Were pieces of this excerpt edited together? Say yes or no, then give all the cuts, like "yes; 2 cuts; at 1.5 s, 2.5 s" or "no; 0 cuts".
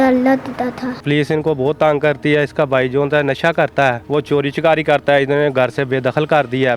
yes; 2 cuts; at 1.0 s, 4.0 s